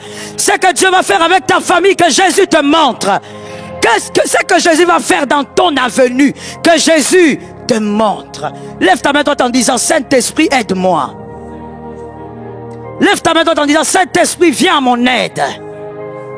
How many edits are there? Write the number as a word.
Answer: zero